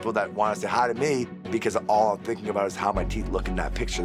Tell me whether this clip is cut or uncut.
cut